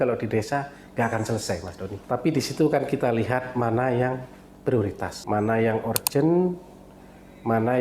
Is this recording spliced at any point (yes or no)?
yes